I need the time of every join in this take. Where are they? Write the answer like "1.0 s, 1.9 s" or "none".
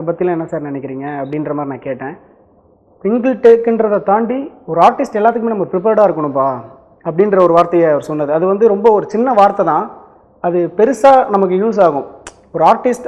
none